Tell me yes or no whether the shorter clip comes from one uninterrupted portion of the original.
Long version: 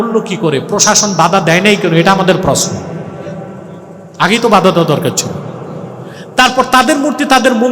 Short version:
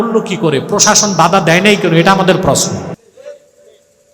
yes